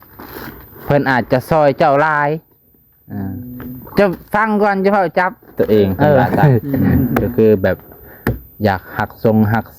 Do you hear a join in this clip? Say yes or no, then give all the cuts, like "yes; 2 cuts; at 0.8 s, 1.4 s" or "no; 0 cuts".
yes; 1 cut; at 7.1 s